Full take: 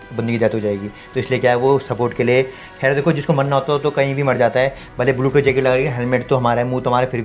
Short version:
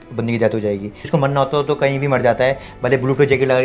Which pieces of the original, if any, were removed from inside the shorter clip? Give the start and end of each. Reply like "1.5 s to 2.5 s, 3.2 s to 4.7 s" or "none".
1.0 s to 3.2 s